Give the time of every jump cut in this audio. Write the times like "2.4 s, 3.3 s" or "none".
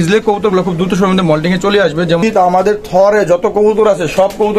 2.2 s